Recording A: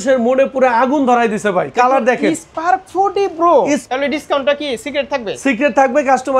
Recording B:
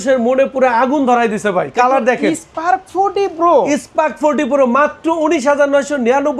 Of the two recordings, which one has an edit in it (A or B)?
A